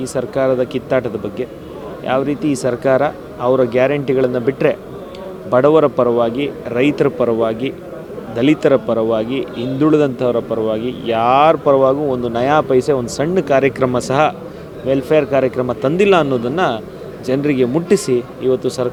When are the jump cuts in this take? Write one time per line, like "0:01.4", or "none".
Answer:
none